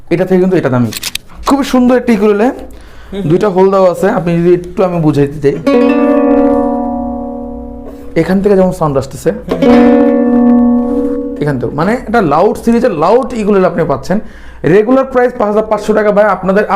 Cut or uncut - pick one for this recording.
cut